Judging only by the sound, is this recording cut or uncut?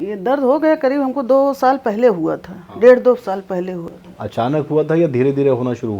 uncut